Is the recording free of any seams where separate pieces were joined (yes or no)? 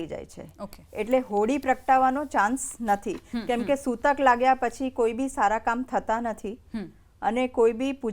yes